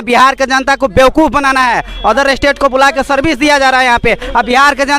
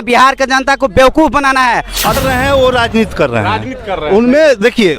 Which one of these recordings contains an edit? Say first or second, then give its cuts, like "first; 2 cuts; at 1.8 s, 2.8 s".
second; 1 cut; at 2.2 s